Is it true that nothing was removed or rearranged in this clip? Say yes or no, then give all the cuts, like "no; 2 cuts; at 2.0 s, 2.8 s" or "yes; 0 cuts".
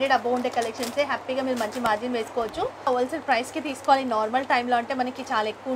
no; 1 cut; at 2.9 s